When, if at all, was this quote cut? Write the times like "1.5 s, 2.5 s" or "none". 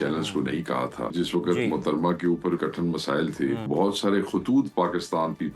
1.1 s, 2.6 s, 3.7 s